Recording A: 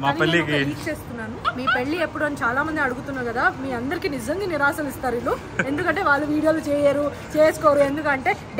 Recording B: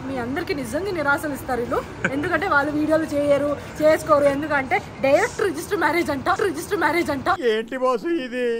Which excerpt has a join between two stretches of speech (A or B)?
A